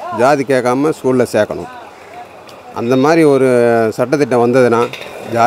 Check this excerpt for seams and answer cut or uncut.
uncut